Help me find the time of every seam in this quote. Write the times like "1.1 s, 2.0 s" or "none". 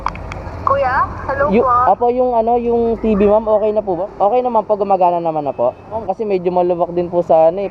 4.0 s, 6.0 s